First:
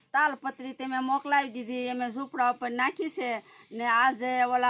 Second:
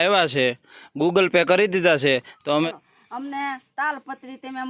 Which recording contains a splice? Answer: second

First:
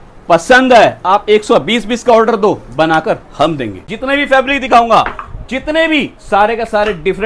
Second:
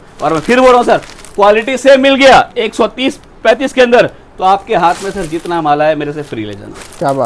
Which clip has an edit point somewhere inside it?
first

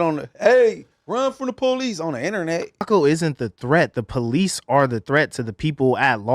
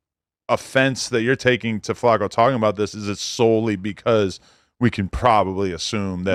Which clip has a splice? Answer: first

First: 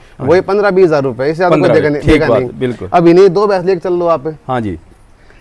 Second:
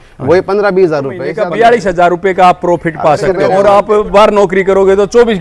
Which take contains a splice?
second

